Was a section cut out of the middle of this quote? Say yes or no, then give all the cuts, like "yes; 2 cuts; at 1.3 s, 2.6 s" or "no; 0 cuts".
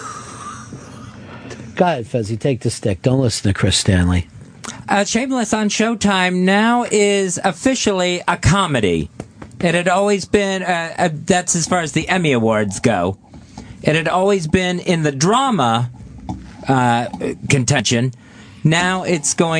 yes; 1 cut; at 4.1 s